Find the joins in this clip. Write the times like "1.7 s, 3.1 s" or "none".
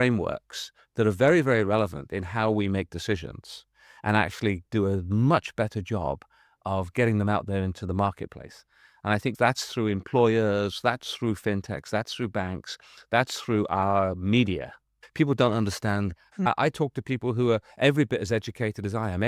15.0 s, 16.2 s